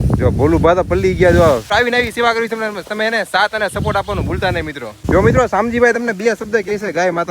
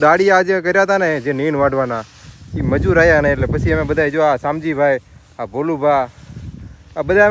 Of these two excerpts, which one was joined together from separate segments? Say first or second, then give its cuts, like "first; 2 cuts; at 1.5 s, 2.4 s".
first; 2 cuts; at 1.7 s, 4.9 s